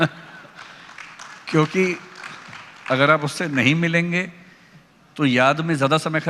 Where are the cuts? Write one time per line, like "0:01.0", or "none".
none